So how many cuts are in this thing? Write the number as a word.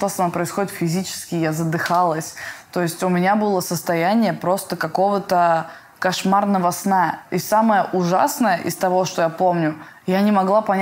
zero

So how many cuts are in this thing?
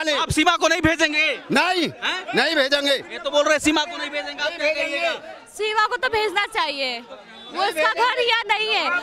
zero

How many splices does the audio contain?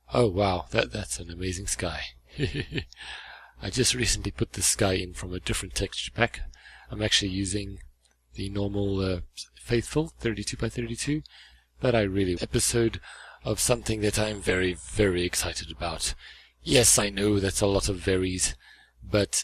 zero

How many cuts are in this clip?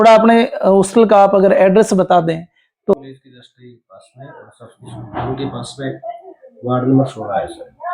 one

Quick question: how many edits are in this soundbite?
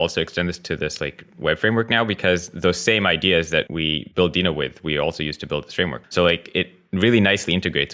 two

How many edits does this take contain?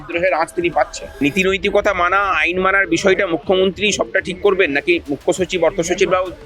one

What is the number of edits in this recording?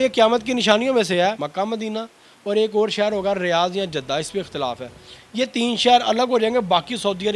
one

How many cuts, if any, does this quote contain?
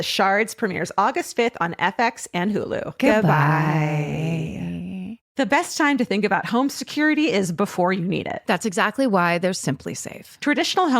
one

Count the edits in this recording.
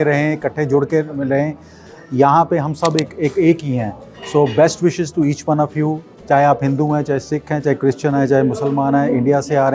zero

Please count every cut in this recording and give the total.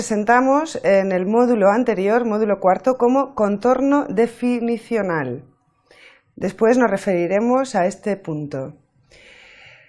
one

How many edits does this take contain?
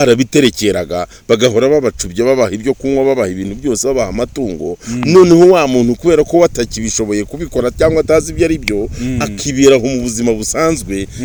zero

